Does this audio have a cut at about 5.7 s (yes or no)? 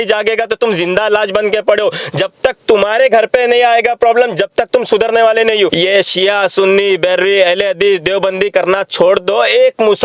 yes